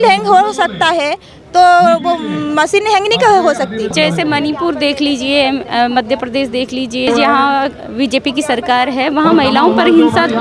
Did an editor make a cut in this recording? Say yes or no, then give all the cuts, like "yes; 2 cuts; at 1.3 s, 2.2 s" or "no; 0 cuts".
yes; 2 cuts; at 3.9 s, 7.1 s